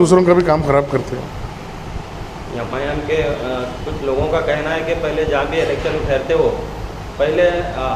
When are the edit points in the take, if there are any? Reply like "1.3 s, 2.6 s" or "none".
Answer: none